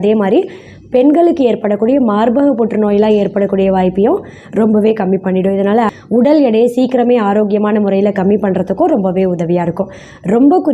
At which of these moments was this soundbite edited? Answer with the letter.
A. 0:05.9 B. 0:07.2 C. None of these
A